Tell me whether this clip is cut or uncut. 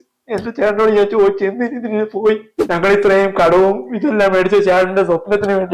cut